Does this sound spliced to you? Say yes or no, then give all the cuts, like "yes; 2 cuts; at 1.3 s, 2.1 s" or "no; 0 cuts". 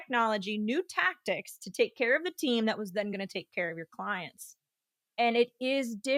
no; 0 cuts